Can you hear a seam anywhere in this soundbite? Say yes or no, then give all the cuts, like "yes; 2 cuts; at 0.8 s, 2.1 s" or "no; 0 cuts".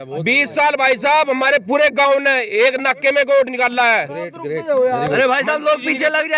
no; 0 cuts